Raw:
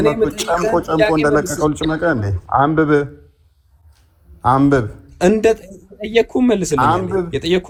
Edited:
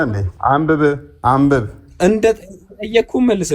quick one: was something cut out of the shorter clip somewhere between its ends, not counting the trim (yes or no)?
yes